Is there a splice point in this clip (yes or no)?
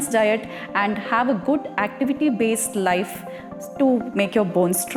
no